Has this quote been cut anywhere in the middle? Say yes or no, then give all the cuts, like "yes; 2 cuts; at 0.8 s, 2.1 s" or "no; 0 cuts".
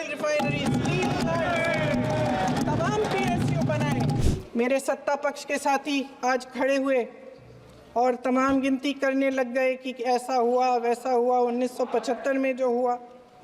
yes; 1 cut; at 4.2 s